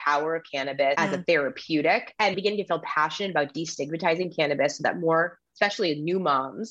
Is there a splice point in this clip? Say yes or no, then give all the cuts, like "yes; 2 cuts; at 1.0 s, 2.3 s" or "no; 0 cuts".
yes; 2 cuts; at 1.0 s, 2.3 s